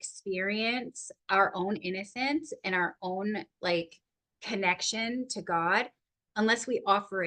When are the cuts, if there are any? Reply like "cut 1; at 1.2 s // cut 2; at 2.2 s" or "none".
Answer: none